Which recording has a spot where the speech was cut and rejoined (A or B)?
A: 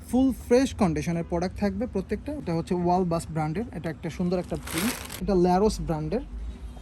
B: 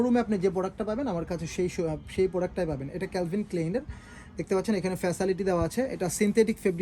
A